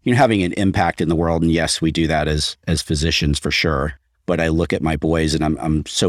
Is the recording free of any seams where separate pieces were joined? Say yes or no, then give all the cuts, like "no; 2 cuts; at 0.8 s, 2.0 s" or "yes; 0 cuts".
yes; 0 cuts